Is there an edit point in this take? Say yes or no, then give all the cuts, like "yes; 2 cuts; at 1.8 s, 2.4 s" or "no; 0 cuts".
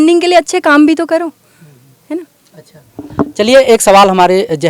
no; 0 cuts